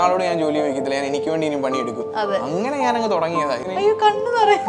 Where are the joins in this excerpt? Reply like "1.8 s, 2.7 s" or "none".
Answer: 3.7 s